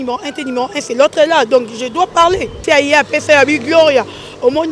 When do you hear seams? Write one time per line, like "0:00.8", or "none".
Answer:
0:02.6